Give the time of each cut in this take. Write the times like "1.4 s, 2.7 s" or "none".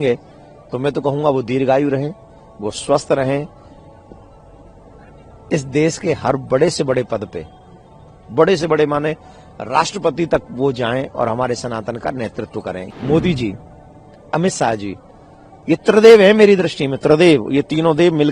12.9 s